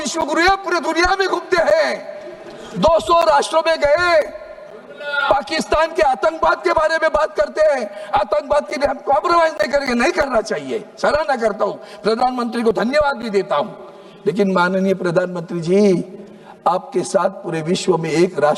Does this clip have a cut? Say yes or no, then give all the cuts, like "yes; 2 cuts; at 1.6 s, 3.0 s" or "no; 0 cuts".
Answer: no; 0 cuts